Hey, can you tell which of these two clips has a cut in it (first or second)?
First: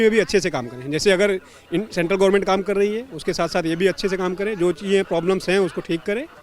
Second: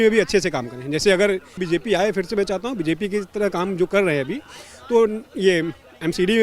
second